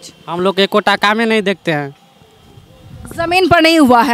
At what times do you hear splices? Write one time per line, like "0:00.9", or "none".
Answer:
none